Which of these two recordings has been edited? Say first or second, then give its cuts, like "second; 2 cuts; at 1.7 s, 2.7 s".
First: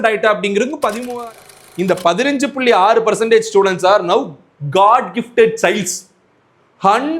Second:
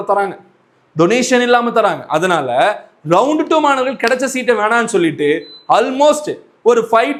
first; 1 cut; at 1.5 s